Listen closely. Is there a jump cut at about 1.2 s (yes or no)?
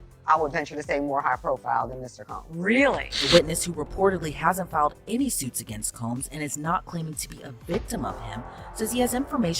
no